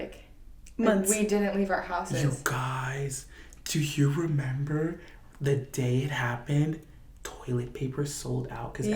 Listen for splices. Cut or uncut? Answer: uncut